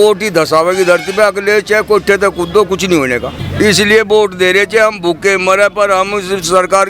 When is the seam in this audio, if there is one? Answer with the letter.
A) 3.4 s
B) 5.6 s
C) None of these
A